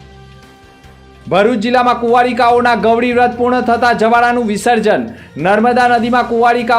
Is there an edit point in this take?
yes; 1 cut; at 1.2 s

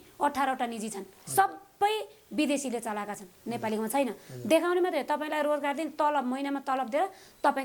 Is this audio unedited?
yes; 0 cuts

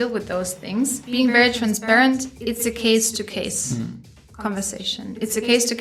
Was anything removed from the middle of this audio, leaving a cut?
yes; 1 cut; at 1.0 s

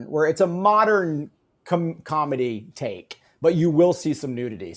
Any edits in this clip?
no; 0 cuts

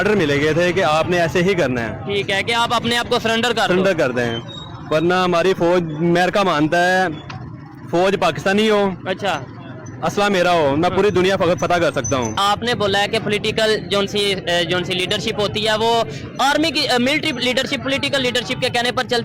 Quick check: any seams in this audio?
yes; 1 cut; at 12.4 s

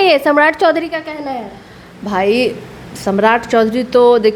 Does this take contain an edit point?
no; 0 cuts

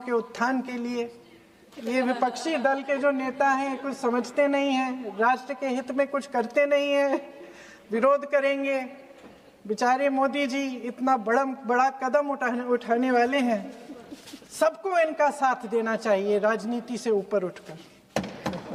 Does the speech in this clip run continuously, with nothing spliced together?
yes; 0 cuts

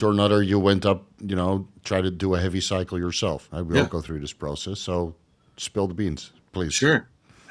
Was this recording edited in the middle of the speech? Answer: yes; 1 cut; at 3.5 s

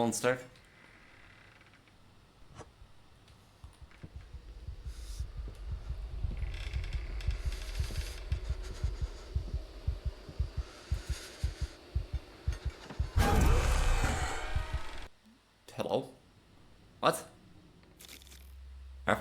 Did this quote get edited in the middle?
yes; 1 cut; at 18.3 s

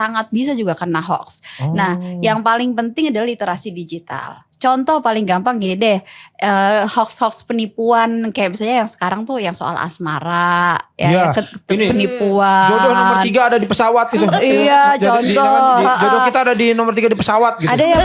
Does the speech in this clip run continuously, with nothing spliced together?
yes; 0 cuts

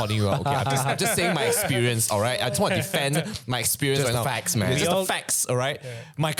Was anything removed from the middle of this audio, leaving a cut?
no; 0 cuts

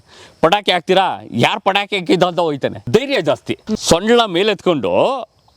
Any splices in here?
yes; 2 cuts; at 2.8 s, 3.8 s

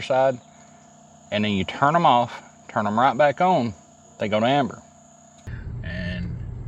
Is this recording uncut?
no; 1 cut; at 5.7 s

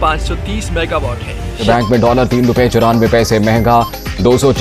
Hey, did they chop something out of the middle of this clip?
yes; 1 cut; at 1.6 s

